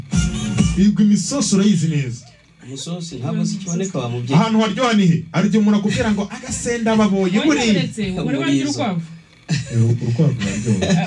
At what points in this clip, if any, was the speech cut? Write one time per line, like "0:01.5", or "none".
none